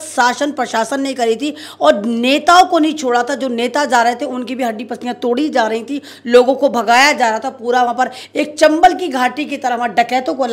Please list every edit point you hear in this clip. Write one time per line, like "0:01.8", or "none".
none